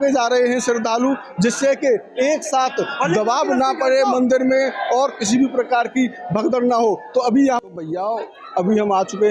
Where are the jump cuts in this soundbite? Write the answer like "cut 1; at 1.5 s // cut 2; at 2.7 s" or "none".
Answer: cut 1; at 7.7 s